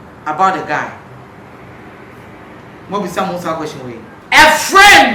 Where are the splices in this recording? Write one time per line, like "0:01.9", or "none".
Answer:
0:04.1